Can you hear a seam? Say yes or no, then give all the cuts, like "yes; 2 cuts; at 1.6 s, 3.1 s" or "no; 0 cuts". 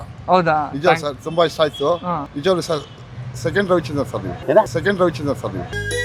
no; 0 cuts